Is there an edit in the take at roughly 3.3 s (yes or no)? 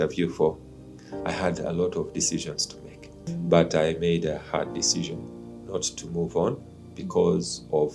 yes